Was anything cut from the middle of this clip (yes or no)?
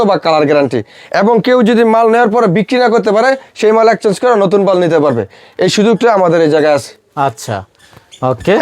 no